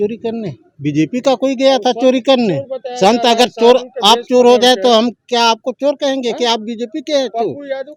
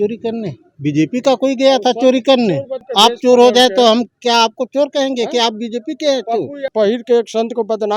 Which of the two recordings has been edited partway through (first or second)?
second